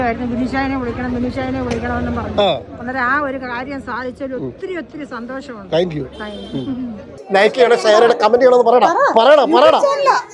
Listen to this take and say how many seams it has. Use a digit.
1